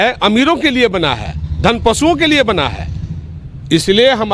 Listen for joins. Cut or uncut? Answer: uncut